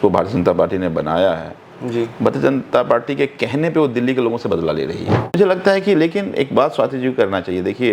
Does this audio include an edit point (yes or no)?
yes